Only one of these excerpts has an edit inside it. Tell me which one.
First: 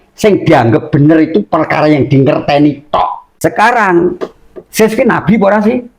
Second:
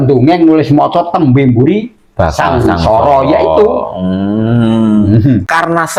first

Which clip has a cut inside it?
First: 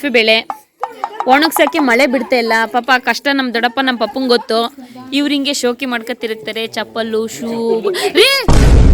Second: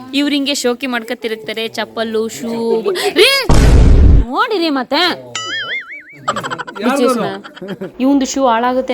second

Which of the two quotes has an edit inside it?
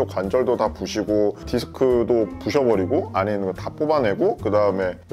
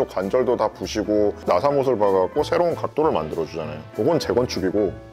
second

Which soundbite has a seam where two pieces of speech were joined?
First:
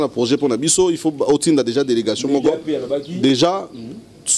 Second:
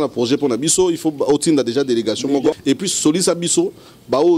second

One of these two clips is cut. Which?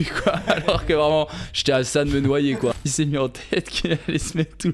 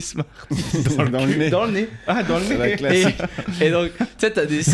first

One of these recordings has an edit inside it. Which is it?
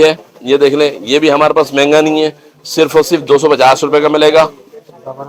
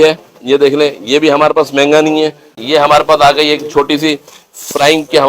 second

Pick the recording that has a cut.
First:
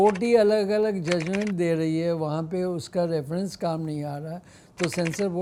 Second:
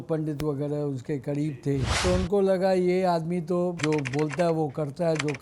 second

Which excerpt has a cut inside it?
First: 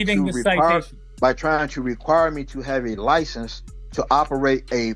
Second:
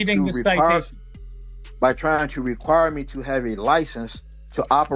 first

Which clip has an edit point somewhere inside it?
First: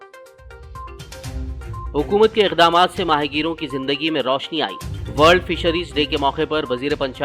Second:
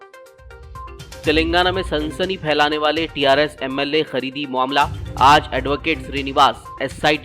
second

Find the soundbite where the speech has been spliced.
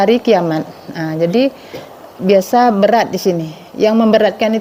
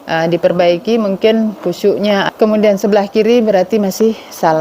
second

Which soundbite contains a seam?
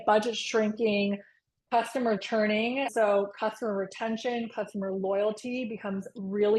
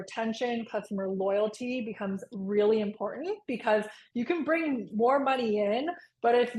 first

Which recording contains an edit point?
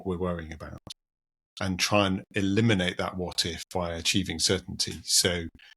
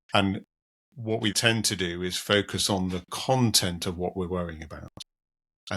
second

